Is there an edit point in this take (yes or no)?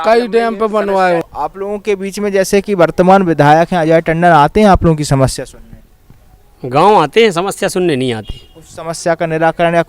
yes